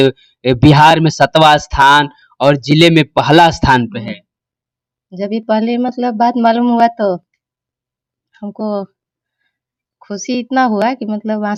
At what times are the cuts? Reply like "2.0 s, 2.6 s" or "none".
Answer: none